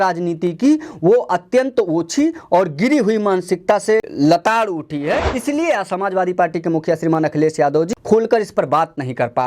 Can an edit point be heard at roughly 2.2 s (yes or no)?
no